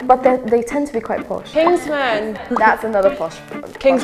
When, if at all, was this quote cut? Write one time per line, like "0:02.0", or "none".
0:01.4